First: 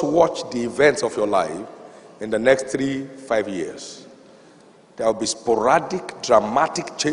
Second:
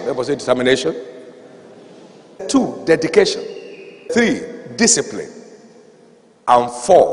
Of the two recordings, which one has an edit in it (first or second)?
second